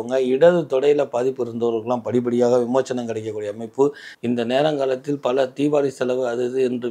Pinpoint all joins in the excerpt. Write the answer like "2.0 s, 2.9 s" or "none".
4.1 s